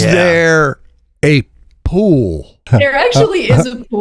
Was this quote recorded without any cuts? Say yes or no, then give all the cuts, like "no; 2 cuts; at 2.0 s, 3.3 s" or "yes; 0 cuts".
no; 1 cut; at 2.6 s